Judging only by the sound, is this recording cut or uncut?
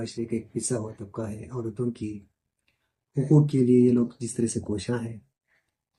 uncut